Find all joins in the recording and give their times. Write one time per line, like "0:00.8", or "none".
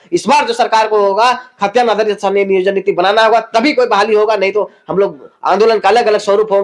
none